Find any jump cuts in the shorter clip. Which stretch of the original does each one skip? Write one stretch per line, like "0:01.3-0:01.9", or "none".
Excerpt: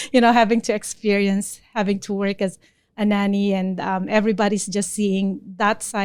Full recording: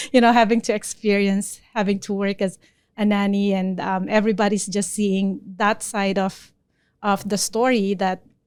none

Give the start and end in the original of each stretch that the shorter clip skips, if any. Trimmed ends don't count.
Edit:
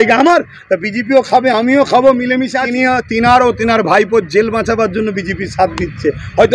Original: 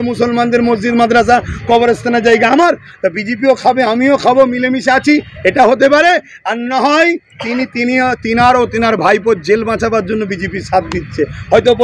0:04.9-0:07.7

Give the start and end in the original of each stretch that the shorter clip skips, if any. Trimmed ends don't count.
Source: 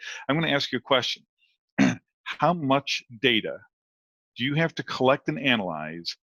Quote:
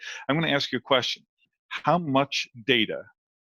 0:01.6-0:02.1

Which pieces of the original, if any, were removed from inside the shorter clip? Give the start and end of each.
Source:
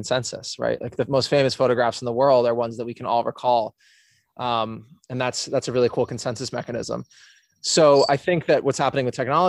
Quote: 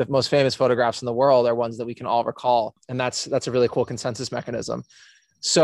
0:03.8-0:05.0

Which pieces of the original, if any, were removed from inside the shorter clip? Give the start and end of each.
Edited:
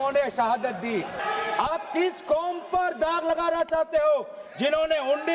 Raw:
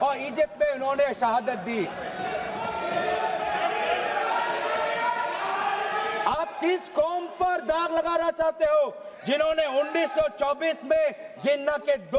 0:02.0-0:05.9

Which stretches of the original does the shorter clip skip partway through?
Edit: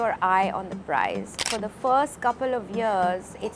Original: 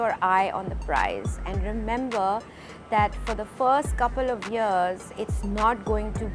0:01.4-0:03.2

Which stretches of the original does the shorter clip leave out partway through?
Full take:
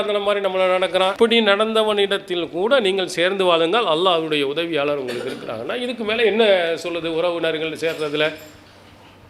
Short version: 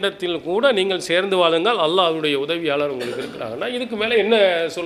none

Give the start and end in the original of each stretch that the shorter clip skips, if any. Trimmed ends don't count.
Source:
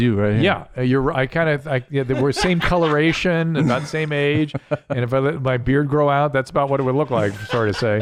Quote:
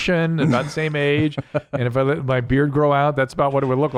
none

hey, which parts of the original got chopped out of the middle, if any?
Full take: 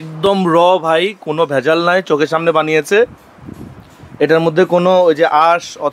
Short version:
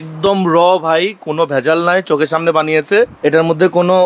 0:03.1-0:04.1

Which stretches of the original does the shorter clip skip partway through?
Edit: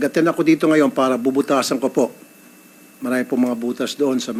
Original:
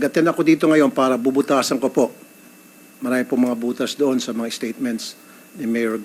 none

